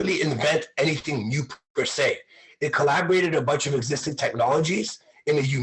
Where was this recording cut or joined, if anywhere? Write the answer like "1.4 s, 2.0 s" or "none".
none